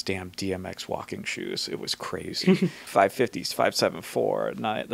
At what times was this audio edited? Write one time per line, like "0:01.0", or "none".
0:02.8